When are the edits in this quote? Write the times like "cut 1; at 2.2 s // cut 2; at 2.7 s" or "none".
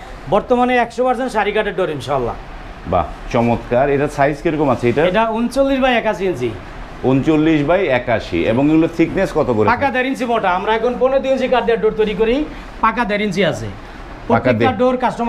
none